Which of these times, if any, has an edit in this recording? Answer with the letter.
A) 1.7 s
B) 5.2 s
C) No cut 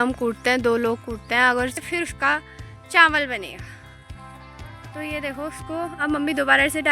A